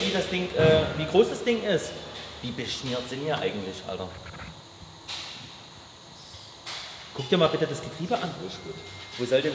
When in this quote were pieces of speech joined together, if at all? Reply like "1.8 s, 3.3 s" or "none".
none